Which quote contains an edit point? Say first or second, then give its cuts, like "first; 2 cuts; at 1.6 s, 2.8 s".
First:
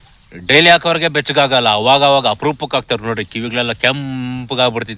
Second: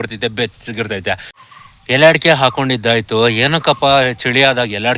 second; 1 cut; at 1.3 s